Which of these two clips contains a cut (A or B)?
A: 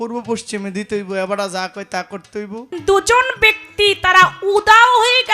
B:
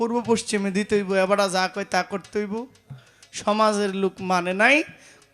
A